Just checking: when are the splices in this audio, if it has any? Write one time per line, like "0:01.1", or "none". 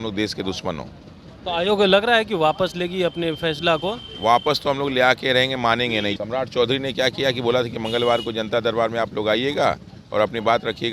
0:06.1

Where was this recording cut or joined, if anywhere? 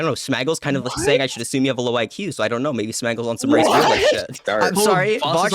0:04.5

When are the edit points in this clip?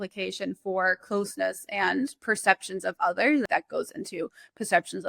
0:03.5

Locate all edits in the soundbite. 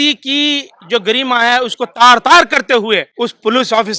0:03.1

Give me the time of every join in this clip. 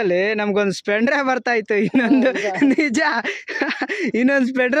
none

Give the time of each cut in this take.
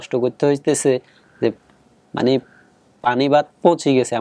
none

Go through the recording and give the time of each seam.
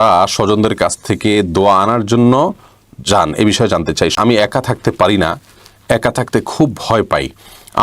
0:04.1

